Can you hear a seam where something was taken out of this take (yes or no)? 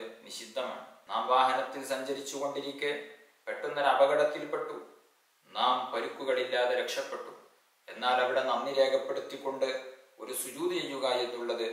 yes